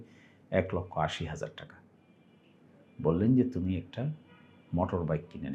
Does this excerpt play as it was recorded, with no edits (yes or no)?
yes